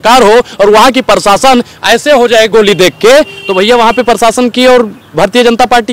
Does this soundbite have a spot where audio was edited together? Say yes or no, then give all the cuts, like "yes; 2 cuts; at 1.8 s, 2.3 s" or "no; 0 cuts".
no; 0 cuts